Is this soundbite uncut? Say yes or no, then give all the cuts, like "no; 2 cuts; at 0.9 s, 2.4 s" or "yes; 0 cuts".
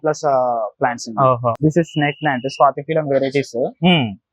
no; 1 cut; at 1.5 s